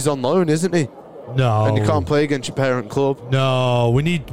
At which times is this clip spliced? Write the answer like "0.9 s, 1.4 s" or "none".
none